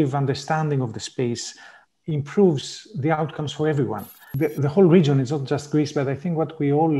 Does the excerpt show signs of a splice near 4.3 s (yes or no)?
yes